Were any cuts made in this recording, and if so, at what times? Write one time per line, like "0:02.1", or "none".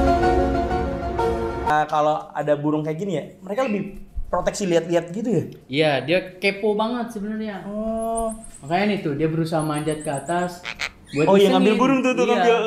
0:01.7